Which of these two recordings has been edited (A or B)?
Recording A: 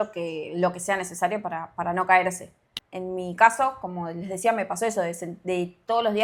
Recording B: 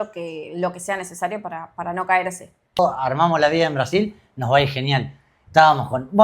B